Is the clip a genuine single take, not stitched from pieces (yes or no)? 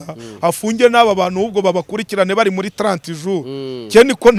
yes